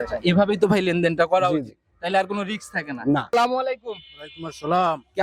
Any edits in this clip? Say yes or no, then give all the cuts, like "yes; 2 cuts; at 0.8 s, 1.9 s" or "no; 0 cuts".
yes; 1 cut; at 3.3 s